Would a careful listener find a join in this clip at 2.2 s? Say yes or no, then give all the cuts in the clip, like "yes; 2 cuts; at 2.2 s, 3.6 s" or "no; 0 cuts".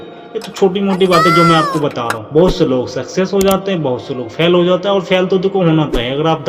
yes; 1 cut; at 2.2 s